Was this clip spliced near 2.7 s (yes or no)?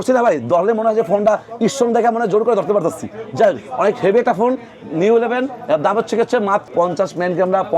no